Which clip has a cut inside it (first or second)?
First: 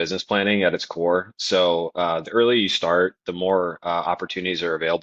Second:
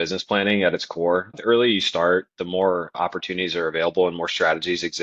second